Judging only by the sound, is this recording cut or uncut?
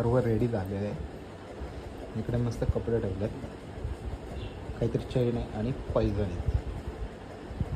uncut